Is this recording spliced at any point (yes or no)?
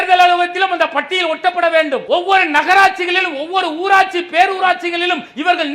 yes